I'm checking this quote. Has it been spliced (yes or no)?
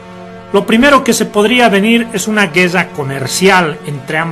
yes